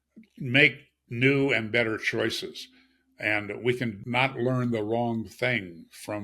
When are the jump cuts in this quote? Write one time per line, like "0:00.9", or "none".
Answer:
0:04.0

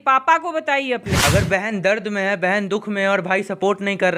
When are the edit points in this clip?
0:01.1

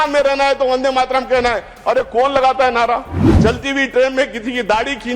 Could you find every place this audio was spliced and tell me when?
0:03.2

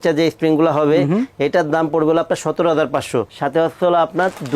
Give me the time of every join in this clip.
0:03.3

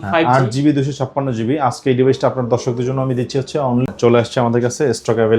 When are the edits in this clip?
0:03.9

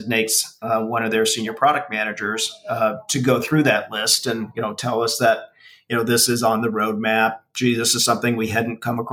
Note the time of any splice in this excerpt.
none

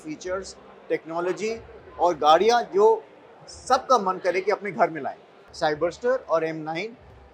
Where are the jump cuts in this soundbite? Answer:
0:05.4

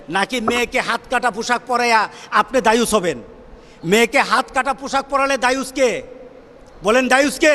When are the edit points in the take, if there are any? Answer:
none

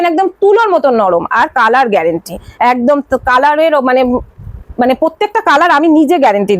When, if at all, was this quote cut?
none

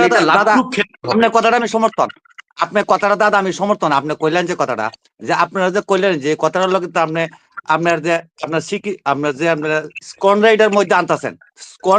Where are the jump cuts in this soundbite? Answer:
none

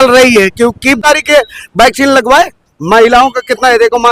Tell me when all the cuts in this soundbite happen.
0:01.0

